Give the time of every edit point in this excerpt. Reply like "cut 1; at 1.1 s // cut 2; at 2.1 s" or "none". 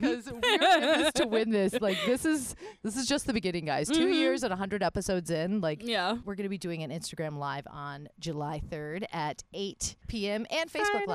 cut 1; at 6.2 s